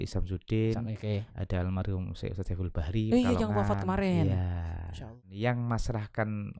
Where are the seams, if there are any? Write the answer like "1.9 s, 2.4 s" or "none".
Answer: 5.2 s